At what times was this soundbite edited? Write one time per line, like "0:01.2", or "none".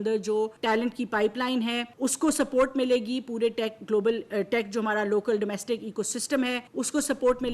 0:00.9
0:01.9
0:06.7